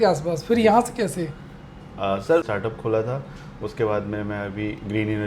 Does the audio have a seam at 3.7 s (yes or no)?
no